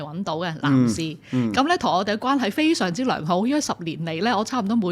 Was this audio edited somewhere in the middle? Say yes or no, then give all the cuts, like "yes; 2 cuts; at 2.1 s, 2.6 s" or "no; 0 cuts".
no; 0 cuts